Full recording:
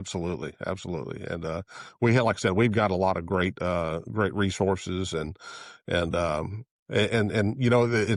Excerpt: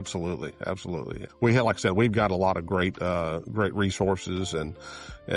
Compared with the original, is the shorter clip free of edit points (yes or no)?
no